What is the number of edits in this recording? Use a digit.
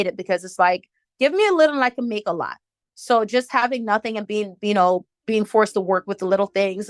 1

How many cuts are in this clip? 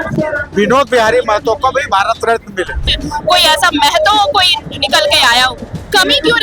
1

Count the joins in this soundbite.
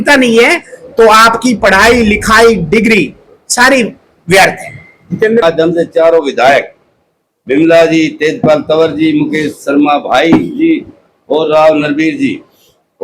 1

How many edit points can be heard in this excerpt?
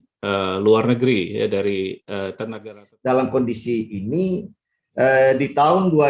1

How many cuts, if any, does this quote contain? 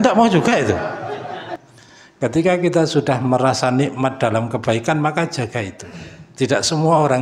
1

